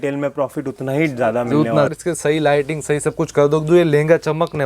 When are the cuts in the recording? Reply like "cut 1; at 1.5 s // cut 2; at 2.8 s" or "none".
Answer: cut 1; at 1.9 s